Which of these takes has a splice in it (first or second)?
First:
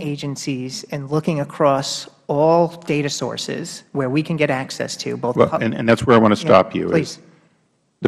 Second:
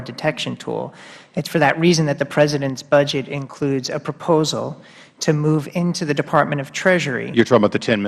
second